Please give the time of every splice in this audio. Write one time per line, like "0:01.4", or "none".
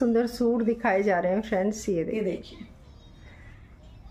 none